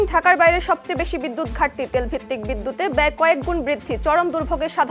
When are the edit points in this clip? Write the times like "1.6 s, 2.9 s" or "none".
none